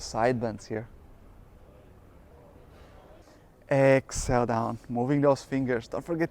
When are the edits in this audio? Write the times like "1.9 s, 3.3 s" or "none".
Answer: 3.2 s